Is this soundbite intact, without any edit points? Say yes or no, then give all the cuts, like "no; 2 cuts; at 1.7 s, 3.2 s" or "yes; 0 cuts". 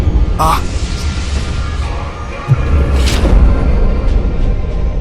yes; 0 cuts